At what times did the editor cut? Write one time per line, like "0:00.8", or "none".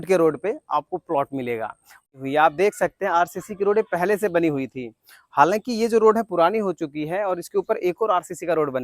0:02.1